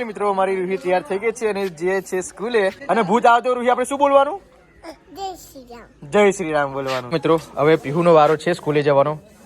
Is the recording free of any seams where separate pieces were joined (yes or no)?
no